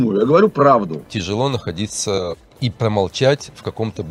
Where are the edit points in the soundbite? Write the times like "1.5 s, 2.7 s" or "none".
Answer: 1.1 s, 2.2 s

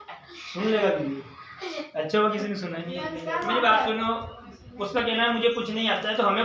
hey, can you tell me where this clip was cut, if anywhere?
3.2 s

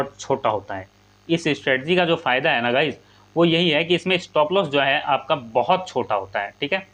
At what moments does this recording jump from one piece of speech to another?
none

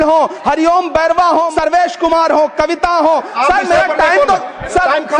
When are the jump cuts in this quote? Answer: 1.5 s, 3.3 s

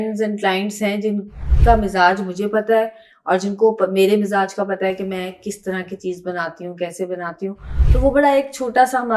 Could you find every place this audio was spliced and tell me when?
none

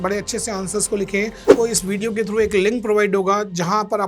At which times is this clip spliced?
1.5 s

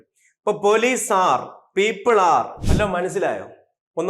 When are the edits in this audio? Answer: 2.6 s

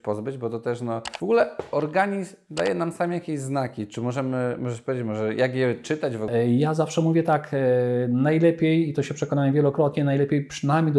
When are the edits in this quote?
1.1 s, 6.2 s

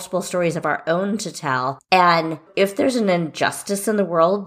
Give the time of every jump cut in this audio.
1.8 s, 2.5 s

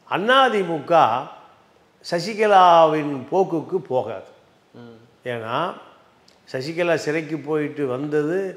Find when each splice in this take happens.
none

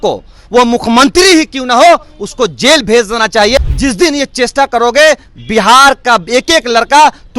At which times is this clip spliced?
3.6 s

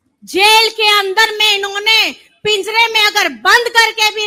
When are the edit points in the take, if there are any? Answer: none

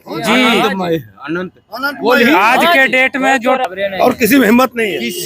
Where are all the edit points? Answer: 3.6 s

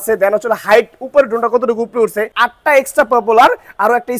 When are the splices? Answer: 2.3 s

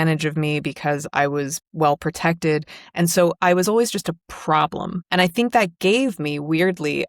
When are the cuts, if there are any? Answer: 5.0 s

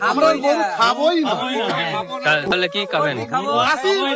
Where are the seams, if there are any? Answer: 2.5 s

